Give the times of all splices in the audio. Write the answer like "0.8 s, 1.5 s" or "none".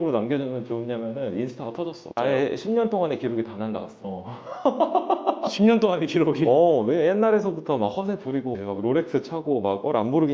none